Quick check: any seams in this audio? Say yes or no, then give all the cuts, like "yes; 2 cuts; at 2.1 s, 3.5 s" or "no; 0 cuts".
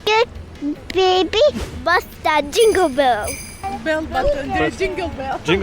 yes; 1 cut; at 1.7 s